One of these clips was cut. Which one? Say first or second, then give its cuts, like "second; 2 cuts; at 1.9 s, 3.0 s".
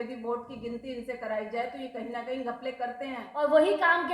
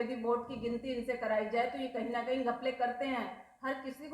first; 1 cut; at 3.2 s